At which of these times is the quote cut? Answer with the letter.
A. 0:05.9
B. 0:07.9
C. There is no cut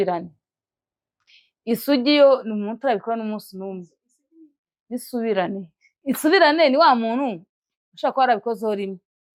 C